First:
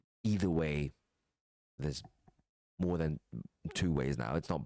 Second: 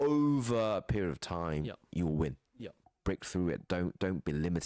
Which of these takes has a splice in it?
second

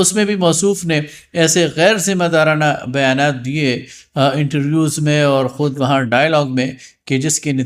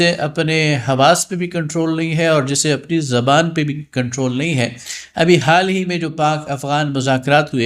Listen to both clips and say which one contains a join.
second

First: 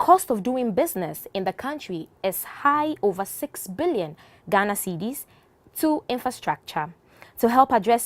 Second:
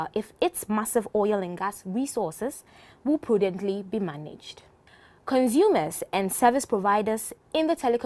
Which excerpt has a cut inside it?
first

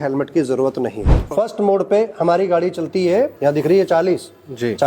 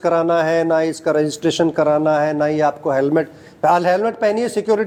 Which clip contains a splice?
first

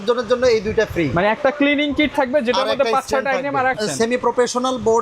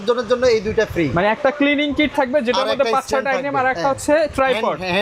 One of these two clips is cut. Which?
first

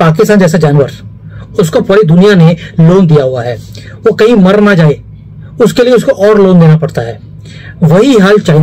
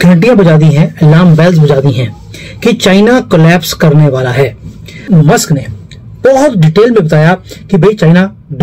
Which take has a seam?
second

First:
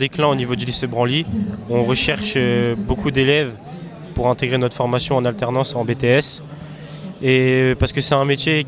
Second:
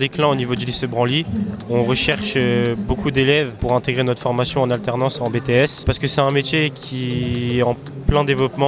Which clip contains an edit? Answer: second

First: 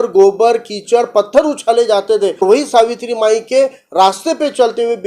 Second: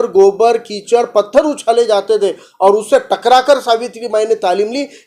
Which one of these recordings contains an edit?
first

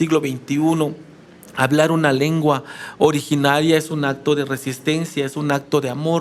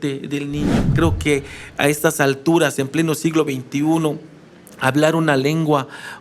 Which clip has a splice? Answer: second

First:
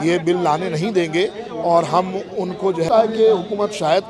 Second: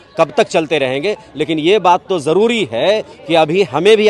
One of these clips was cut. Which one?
first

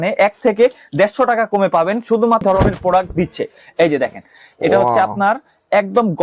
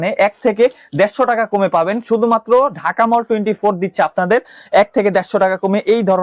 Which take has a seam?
first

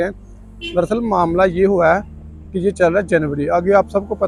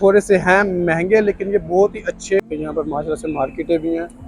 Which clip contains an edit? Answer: second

